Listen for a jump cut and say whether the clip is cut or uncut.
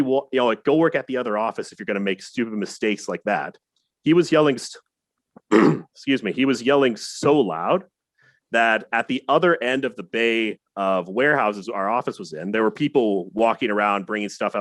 uncut